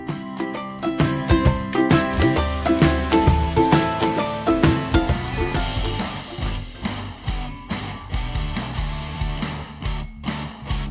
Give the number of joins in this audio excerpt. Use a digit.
1